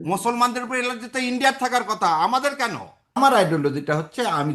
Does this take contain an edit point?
yes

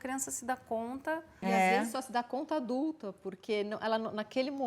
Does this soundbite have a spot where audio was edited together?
yes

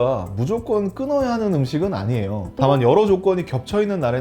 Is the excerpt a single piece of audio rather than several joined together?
no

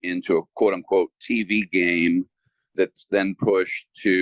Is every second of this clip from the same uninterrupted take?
no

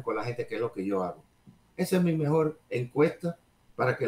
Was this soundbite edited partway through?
no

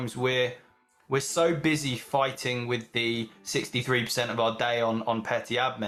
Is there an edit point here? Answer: no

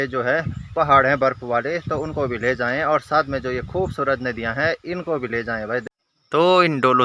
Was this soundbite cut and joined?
yes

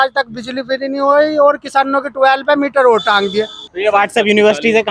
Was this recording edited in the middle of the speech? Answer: yes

